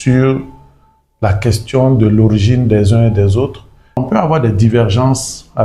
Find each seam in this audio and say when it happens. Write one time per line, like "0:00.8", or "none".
0:04.0

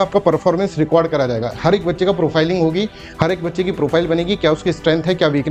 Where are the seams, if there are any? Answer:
none

